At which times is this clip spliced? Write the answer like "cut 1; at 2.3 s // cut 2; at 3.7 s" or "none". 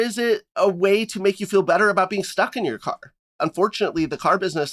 cut 1; at 3.3 s